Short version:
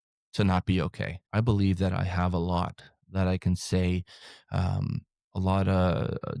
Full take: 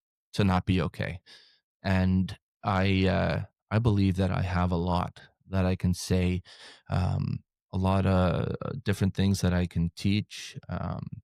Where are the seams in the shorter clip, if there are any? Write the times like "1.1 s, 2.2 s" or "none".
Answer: 1.2 s